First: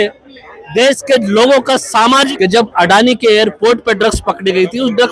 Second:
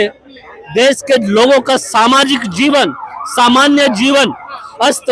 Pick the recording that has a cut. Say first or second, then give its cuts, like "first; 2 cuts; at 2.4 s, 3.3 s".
first; 1 cut; at 2.3 s